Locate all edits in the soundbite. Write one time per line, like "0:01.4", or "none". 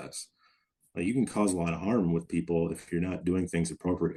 none

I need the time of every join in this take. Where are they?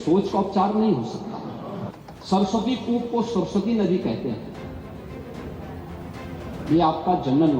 0:01.9

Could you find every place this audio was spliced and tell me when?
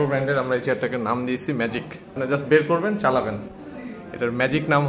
0:02.2
0:03.5

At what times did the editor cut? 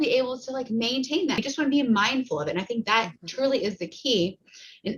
0:01.4

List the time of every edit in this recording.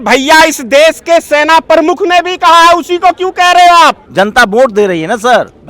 0:04.0

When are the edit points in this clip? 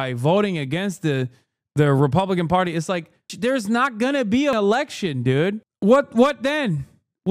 0:03.3
0:04.5

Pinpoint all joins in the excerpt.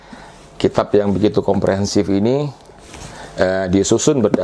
none

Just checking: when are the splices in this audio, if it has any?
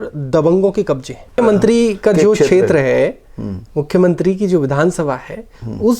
0:01.4

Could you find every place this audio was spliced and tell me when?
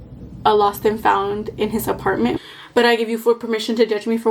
0:02.4

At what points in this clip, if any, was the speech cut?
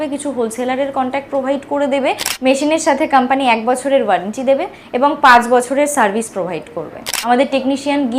0:02.3
0:07.0

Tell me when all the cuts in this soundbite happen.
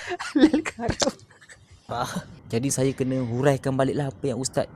0:02.1

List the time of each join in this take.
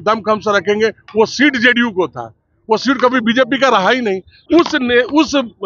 0:04.3

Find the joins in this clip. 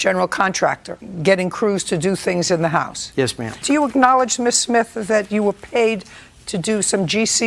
0:03.3

